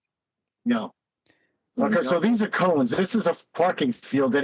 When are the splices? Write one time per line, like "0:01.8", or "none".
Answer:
0:01.6

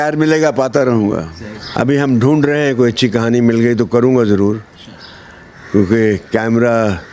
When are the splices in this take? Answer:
0:01.3

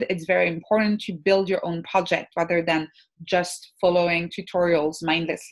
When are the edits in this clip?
none

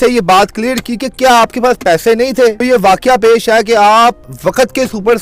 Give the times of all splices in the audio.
0:02.6
0:04.2

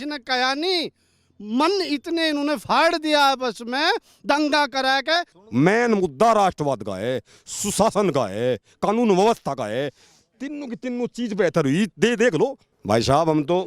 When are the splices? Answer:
0:05.4
0:12.7

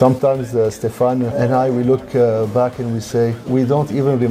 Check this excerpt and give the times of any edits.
none

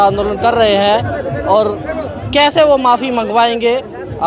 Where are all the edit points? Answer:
none

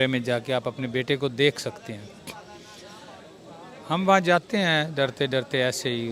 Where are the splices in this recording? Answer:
none

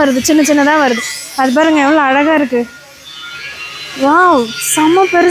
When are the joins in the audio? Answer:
none

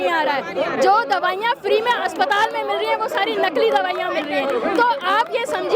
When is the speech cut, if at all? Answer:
none

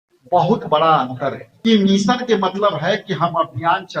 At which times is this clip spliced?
0:01.5

